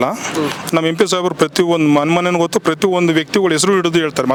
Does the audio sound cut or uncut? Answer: uncut